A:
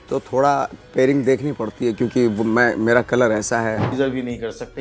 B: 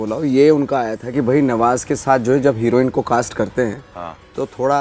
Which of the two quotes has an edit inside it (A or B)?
A